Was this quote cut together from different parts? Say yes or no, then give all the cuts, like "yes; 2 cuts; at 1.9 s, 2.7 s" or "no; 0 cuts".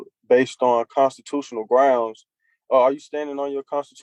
no; 0 cuts